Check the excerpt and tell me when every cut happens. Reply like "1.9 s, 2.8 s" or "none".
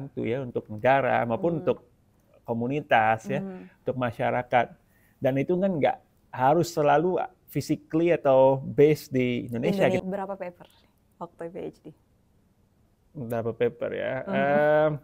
10.0 s